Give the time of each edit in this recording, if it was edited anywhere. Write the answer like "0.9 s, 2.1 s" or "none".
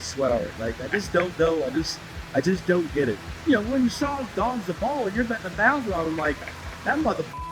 3.2 s